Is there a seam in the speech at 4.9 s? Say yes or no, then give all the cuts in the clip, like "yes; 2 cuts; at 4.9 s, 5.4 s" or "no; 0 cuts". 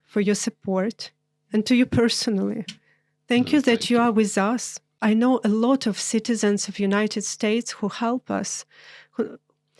yes; 1 cut; at 4.9 s